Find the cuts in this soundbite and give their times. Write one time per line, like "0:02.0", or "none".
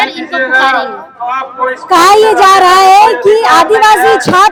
none